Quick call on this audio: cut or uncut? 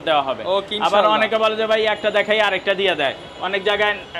uncut